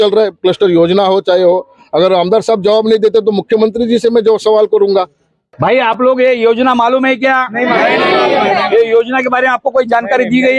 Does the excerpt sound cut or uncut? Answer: cut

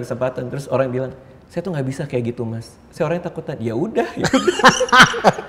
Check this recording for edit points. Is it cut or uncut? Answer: uncut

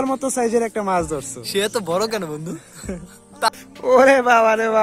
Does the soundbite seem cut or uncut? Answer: cut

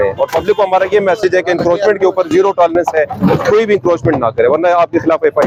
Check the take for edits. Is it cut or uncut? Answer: uncut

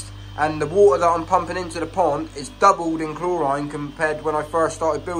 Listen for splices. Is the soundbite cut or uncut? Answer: uncut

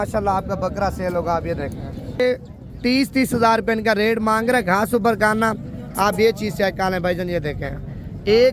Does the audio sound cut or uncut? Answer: cut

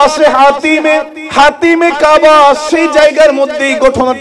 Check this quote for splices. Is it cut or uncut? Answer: cut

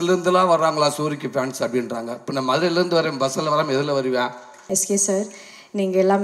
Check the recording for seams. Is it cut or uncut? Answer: cut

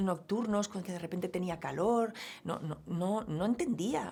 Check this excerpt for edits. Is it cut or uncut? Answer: uncut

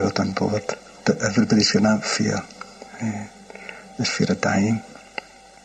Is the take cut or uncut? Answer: uncut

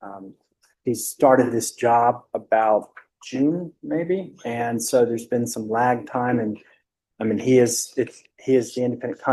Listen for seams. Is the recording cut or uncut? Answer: uncut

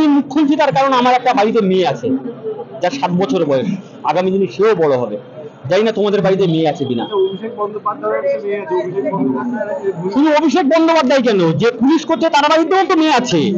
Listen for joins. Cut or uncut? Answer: uncut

